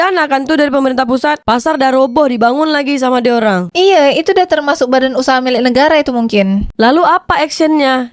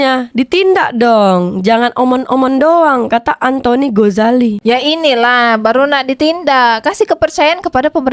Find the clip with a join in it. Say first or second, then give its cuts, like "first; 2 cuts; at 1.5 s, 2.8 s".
first; 1 cut; at 6.7 s